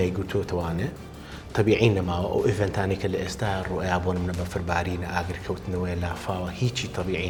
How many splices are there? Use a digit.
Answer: 0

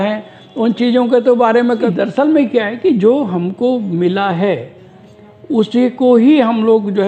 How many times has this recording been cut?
1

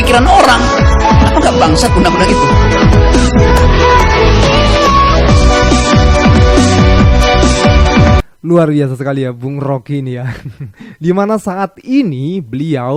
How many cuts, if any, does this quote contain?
0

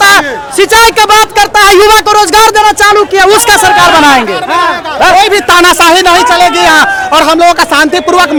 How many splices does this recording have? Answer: 0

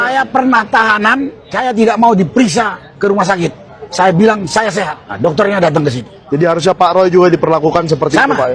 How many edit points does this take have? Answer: 4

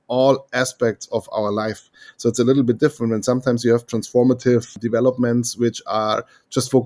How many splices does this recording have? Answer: 1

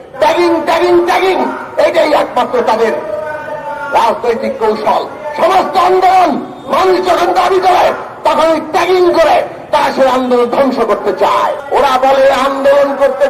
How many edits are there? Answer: 1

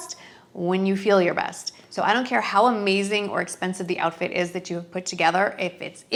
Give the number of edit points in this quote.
0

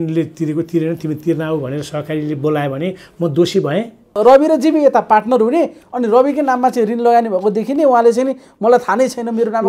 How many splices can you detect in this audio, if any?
1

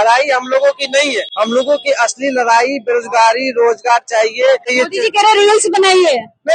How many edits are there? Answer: 2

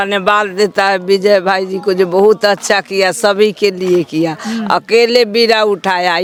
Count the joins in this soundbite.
0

